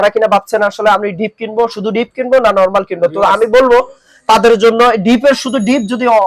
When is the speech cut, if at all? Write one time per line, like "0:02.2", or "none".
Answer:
none